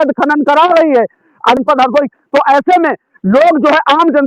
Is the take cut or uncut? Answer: cut